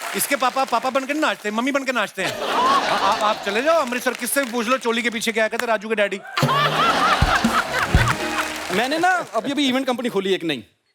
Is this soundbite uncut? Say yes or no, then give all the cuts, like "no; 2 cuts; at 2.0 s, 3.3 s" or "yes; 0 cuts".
no; 1 cut; at 8.6 s